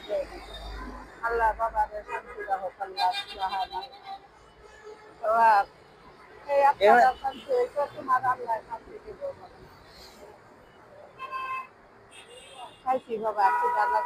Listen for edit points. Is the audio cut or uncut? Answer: uncut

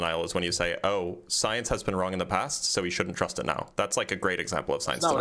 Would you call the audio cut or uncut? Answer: uncut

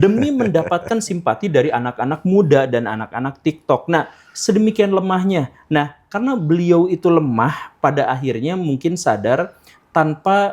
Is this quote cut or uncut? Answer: uncut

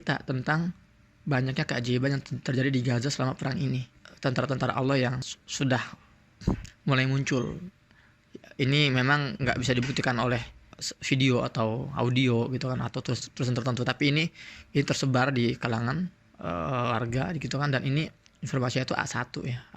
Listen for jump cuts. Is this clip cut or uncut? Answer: uncut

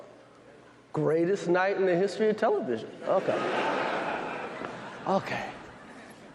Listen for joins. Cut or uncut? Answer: cut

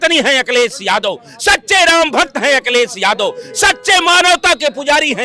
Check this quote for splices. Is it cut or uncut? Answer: uncut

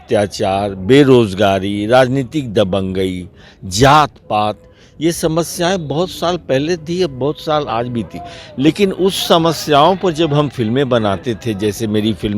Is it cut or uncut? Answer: uncut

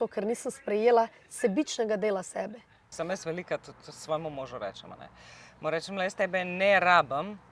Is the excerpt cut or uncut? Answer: cut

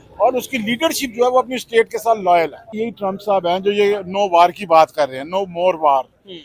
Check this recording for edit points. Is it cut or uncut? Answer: cut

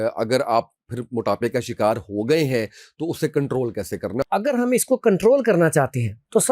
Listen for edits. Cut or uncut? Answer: cut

